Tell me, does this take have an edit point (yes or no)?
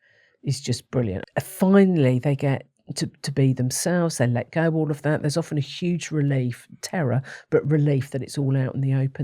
yes